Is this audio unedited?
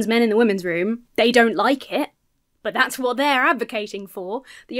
no; 1 cut; at 1.0 s

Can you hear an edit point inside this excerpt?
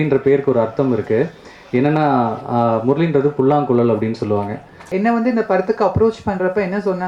yes; 1 cut; at 4.8 s

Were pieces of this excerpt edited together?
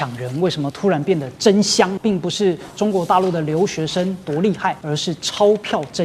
yes; 2 cuts; at 1.9 s, 4.8 s

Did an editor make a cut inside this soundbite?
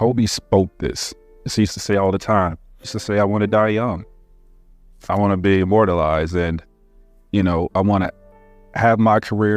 yes; 2 cuts; at 1.4 s, 3.0 s

